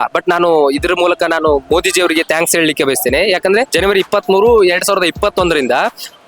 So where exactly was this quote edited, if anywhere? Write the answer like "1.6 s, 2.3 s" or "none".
3.7 s